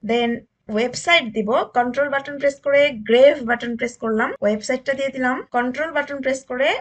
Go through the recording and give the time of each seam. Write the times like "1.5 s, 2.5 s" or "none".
4.3 s, 5.4 s